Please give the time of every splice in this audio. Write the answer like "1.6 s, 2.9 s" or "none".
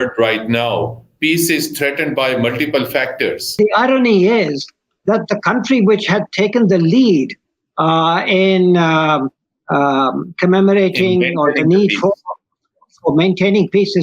3.5 s